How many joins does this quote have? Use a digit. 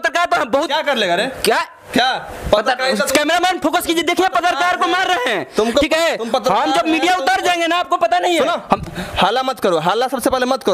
0